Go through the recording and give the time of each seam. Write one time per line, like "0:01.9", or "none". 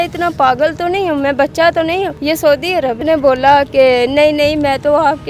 0:02.2
0:03.0